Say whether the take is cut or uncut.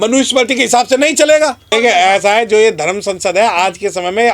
cut